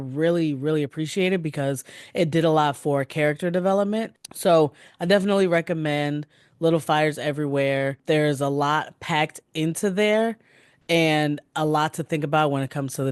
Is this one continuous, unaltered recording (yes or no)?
no